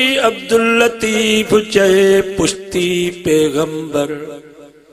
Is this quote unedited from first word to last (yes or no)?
yes